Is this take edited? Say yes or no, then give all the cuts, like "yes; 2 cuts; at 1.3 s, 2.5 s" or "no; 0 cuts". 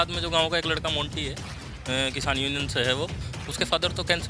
no; 0 cuts